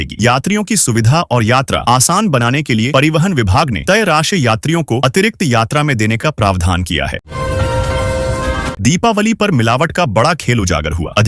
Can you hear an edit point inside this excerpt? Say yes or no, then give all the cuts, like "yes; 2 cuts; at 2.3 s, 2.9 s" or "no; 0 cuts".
yes; 2 cuts; at 7.2 s, 8.7 s